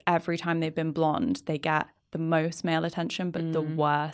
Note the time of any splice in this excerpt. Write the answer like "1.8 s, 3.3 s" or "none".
none